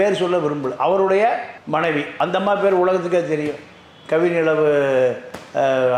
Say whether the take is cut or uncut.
uncut